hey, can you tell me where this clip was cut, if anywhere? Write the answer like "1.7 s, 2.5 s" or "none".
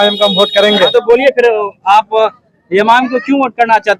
none